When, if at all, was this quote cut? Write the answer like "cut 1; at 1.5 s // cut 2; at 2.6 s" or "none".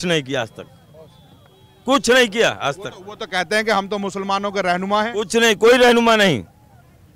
none